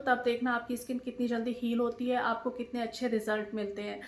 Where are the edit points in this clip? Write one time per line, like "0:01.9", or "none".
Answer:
none